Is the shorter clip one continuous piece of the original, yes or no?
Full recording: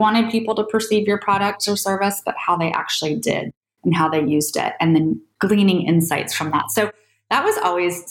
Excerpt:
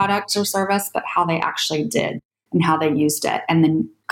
yes